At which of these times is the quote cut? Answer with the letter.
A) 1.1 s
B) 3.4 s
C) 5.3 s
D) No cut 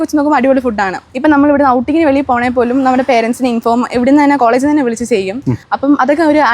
A